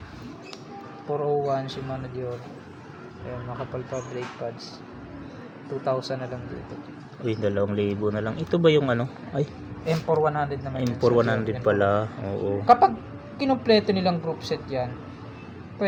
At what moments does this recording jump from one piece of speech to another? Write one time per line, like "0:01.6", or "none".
none